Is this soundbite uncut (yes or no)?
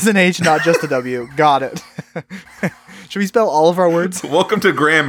no